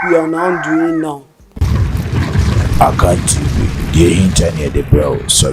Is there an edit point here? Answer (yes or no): yes